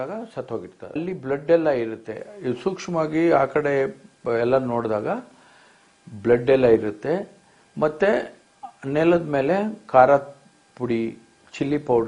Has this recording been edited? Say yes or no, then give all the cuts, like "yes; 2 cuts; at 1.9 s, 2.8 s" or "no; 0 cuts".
no; 0 cuts